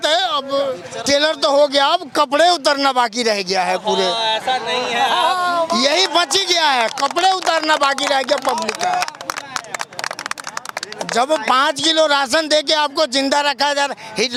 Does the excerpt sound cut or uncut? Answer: uncut